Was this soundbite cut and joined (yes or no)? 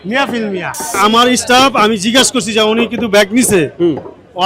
yes